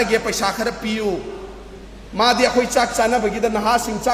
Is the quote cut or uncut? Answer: uncut